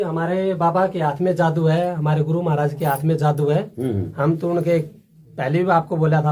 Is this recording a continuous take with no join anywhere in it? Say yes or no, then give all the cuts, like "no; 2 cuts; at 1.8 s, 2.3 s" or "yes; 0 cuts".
yes; 0 cuts